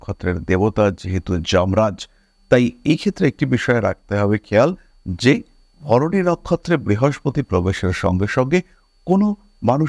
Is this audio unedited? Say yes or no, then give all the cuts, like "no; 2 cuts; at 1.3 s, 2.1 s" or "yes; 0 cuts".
yes; 0 cuts